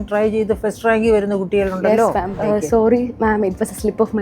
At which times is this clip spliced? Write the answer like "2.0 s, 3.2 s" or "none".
2.3 s